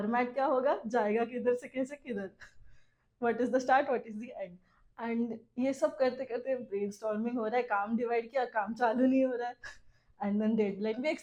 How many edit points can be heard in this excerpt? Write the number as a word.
zero